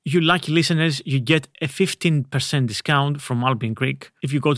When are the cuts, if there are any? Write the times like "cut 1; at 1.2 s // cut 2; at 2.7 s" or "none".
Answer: none